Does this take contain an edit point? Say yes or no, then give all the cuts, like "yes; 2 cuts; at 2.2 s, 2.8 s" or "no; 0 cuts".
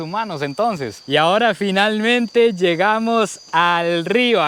no; 0 cuts